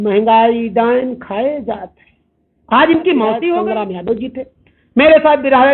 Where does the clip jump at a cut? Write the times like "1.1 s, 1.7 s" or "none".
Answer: 3.6 s